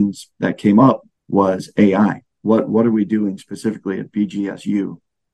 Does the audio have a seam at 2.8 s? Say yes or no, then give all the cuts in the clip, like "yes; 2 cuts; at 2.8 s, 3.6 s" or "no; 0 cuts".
no; 1 cut; at 1.1 s